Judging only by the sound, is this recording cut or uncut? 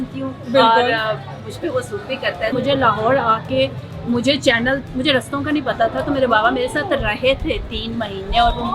cut